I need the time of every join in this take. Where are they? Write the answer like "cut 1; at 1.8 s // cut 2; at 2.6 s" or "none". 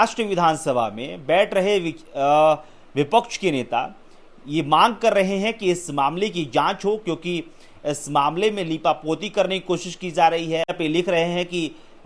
cut 1; at 10.7 s